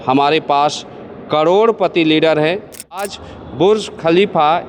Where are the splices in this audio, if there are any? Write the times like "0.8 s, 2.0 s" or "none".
3.1 s